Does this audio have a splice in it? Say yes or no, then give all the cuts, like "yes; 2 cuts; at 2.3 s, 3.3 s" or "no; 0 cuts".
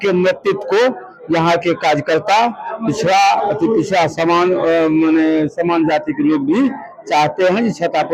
no; 0 cuts